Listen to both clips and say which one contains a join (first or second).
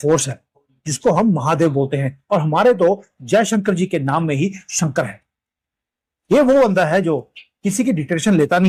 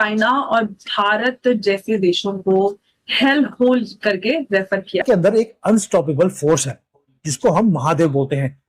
second